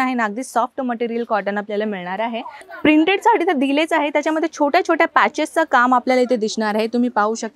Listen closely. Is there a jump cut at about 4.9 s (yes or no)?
no